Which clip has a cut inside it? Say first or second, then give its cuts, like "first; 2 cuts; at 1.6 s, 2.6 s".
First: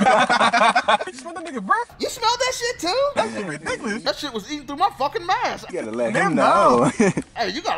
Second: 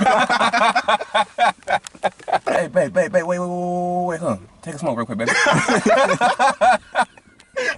first; 1 cut; at 1.1 s